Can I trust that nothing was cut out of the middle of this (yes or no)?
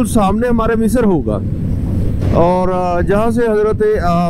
yes